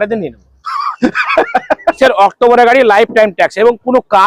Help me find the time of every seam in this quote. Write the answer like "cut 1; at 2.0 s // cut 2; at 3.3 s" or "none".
cut 1; at 2.0 s